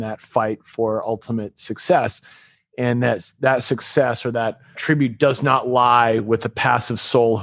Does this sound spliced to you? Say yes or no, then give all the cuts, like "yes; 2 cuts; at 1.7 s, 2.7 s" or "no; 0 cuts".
yes; 1 cut; at 4.8 s